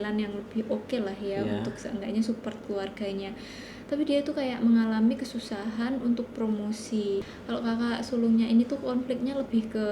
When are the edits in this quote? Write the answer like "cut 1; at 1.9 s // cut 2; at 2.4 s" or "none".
cut 1; at 7.2 s